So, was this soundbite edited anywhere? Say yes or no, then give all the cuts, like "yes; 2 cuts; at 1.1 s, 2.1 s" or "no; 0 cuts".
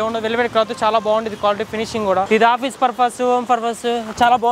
yes; 1 cut; at 2.3 s